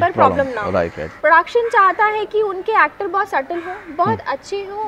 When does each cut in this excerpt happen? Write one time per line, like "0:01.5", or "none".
0:01.0